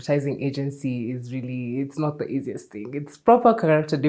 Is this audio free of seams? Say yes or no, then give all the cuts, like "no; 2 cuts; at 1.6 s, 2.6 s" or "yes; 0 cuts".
yes; 0 cuts